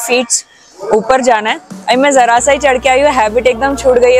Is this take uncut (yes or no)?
yes